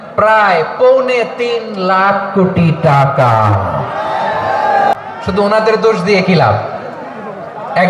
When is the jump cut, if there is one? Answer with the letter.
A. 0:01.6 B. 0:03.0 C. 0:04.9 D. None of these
C